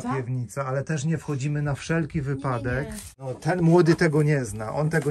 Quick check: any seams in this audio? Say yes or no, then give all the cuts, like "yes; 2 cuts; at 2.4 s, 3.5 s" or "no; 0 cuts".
yes; 1 cut; at 3.1 s